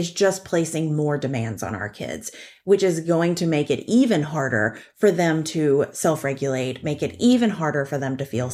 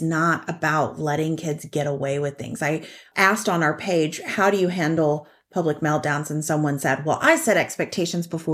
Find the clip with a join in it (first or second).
second